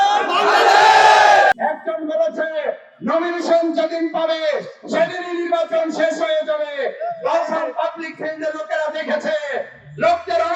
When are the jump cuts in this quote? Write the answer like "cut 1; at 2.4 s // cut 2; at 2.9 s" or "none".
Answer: cut 1; at 1.5 s